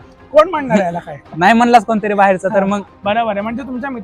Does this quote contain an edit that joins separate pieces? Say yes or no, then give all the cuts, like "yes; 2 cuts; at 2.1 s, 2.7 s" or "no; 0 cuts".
yes; 1 cut; at 2.9 s